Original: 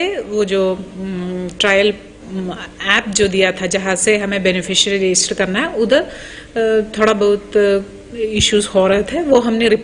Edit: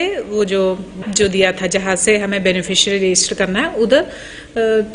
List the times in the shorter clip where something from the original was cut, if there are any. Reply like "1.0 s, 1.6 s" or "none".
1.0 s